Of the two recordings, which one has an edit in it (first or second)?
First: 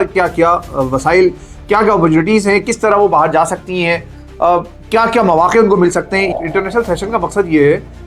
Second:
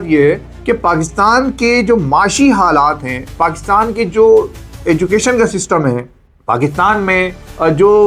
first